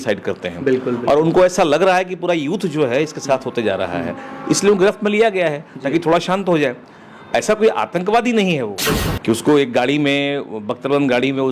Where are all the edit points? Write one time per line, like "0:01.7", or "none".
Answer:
0:08.9

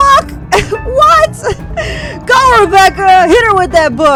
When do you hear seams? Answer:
none

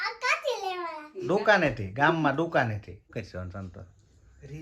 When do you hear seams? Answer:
0:03.1

